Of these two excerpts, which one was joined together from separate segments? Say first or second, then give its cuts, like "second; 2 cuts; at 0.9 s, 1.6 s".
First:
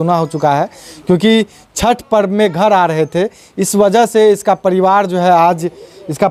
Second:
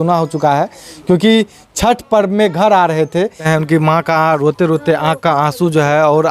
second; 1 cut; at 3.5 s